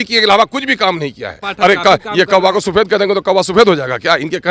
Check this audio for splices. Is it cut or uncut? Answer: cut